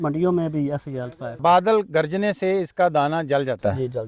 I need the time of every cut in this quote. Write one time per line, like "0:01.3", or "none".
0:01.2

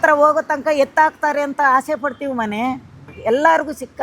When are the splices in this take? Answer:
0:03.1

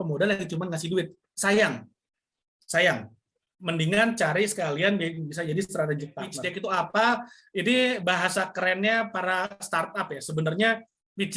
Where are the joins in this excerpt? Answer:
0:06.4

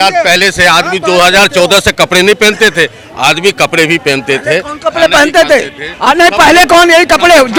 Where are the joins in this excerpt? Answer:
none

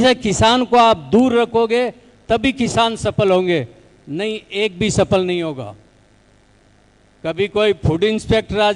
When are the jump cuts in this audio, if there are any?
none

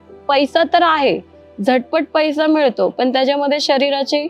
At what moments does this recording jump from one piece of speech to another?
none

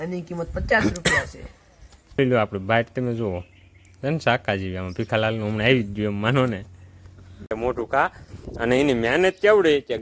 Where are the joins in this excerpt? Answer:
0:02.2
0:07.5

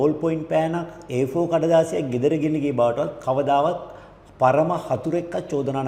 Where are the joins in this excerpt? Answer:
none

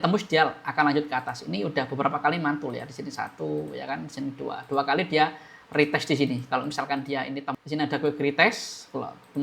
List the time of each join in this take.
0:07.4

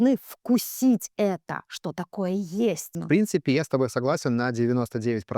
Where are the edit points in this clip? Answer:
0:03.0

